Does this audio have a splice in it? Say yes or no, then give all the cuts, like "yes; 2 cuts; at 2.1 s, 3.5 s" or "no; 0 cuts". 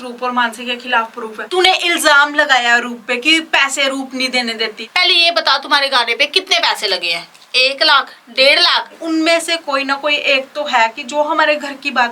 yes; 3 cuts; at 1.5 s, 4.8 s, 8.9 s